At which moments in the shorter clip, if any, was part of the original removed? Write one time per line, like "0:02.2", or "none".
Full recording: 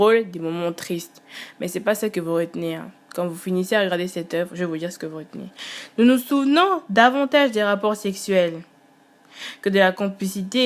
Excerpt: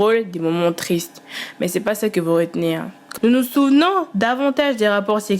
0:03.0